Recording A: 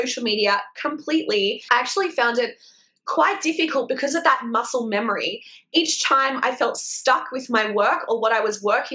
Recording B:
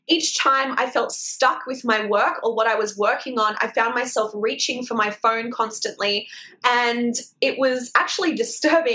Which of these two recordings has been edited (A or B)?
A